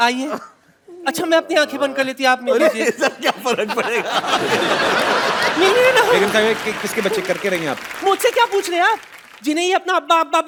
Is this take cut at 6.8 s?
no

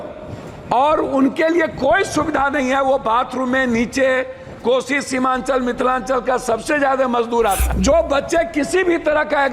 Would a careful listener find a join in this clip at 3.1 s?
no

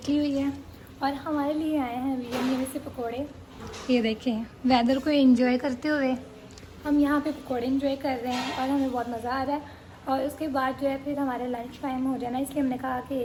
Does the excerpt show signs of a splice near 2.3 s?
no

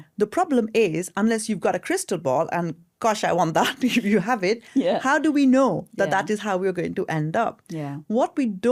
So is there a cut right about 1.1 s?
no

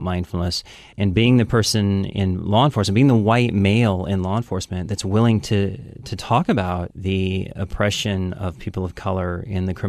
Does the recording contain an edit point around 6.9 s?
yes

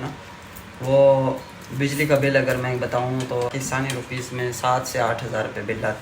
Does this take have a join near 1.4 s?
no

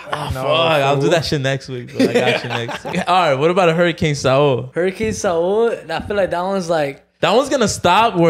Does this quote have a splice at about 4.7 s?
yes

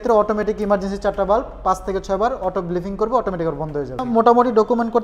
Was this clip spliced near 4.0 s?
yes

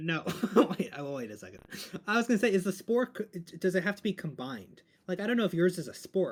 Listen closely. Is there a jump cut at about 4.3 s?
no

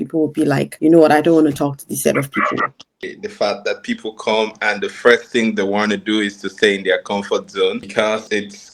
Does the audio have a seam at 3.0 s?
yes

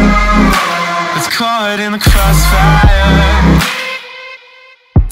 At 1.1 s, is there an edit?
yes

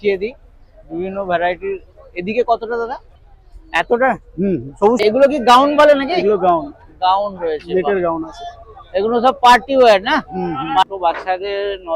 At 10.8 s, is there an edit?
yes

